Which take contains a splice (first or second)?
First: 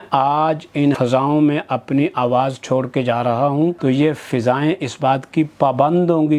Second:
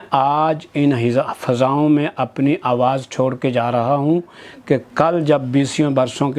first